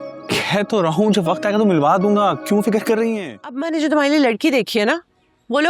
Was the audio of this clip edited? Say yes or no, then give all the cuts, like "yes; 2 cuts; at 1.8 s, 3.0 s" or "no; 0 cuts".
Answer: yes; 1 cut; at 3.6 s